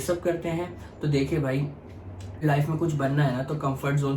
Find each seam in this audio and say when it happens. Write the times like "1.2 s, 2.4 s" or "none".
2.4 s